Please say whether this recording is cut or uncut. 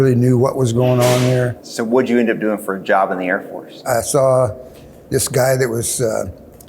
cut